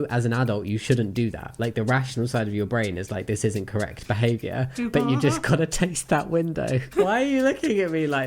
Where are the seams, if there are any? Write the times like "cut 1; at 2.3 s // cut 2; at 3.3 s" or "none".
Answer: cut 1; at 6.9 s